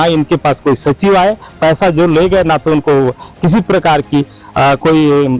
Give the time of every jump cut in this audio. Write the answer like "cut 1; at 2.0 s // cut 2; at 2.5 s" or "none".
none